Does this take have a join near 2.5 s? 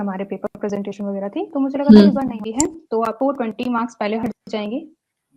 yes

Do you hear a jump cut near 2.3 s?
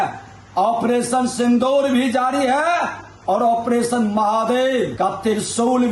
no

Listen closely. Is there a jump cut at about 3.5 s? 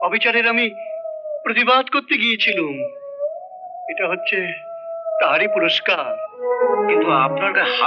no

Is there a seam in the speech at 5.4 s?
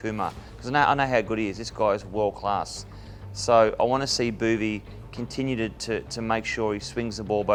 no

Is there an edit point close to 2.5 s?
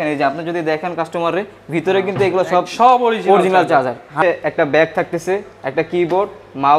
no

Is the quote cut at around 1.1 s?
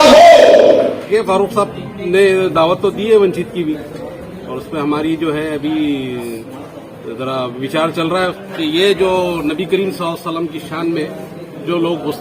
yes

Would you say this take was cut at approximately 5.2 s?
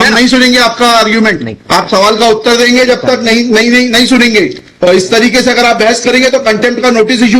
no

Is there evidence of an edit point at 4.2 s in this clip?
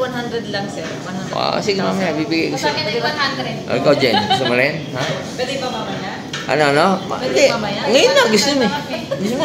no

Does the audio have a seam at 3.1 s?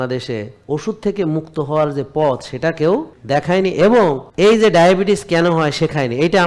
yes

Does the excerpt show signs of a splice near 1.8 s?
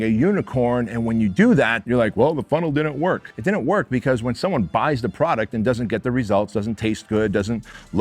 yes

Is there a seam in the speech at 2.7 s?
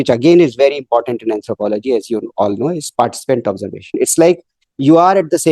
no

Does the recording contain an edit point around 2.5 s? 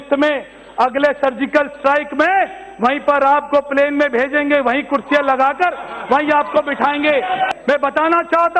no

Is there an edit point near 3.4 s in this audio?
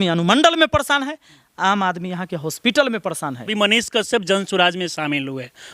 yes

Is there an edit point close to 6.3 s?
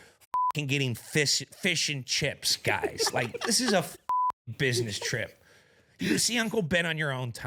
no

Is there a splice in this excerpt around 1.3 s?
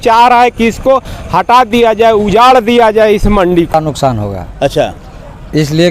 no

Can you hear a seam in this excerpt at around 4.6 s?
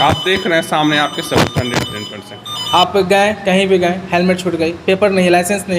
no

